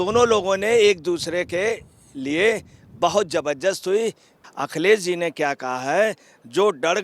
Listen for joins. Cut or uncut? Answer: cut